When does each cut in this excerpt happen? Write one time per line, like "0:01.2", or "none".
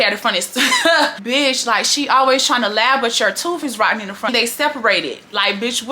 0:01.1